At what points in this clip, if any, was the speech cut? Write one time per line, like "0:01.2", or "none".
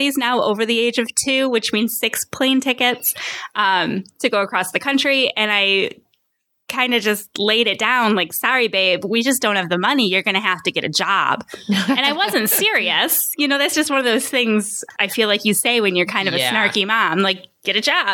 0:14.8